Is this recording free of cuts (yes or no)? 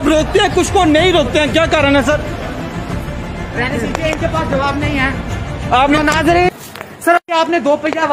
no